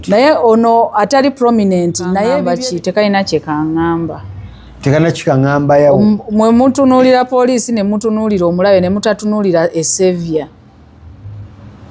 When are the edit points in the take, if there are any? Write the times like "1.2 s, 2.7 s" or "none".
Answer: 2.4 s